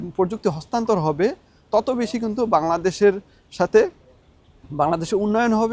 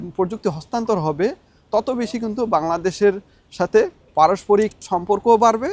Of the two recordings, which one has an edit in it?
second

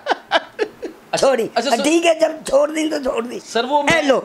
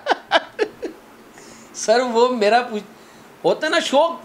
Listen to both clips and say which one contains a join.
first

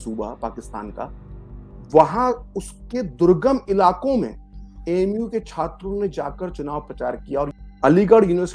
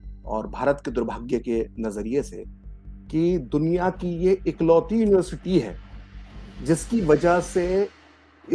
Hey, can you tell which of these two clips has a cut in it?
first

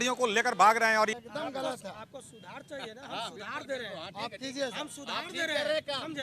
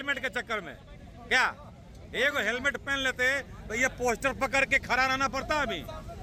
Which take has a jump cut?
first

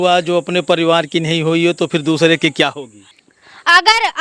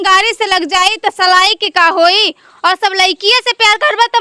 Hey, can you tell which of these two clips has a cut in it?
first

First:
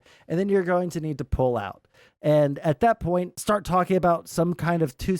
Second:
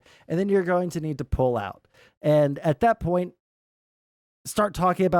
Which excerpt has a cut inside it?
first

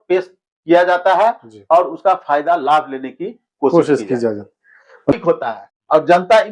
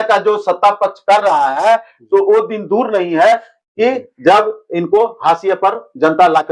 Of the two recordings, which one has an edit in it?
first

